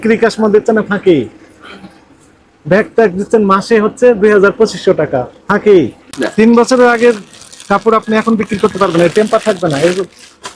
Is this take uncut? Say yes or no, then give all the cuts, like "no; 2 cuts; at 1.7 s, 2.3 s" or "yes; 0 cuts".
no; 1 cut; at 6.0 s